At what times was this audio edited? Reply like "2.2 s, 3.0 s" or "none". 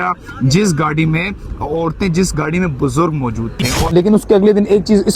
3.8 s